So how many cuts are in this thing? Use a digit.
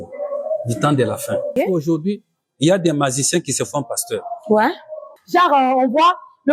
2